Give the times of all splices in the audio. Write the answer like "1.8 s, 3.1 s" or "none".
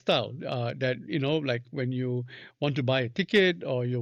none